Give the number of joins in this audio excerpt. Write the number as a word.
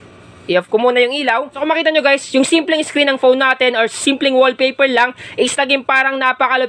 one